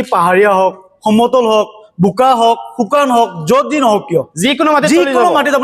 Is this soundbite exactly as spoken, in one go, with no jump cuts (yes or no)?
yes